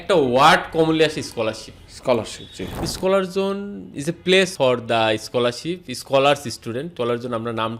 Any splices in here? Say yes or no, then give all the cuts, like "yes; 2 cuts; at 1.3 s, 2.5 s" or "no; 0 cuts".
yes; 3 cuts; at 2.8 s, 4.5 s, 6.9 s